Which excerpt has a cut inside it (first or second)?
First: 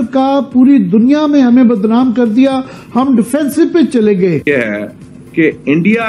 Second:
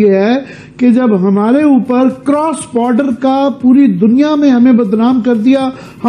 first